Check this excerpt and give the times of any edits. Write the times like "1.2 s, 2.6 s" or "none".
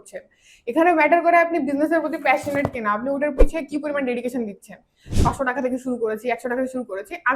5.2 s